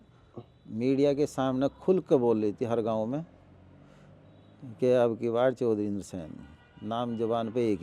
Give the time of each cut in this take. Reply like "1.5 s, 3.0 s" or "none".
none